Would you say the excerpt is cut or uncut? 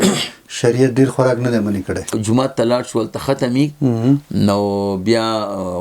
cut